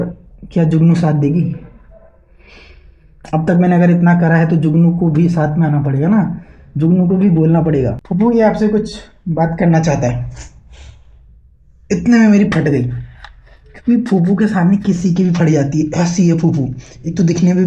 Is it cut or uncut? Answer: cut